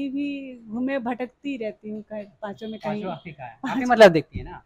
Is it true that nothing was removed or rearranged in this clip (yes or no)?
yes